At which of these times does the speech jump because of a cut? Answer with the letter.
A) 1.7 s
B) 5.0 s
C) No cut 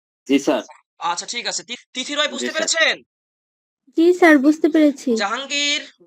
A